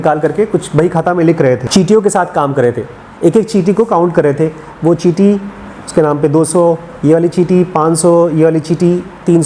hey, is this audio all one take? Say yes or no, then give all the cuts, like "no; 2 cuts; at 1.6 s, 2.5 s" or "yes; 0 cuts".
no; 1 cut; at 1.6 s